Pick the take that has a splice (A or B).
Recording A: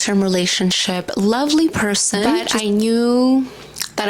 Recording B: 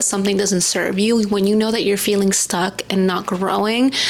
A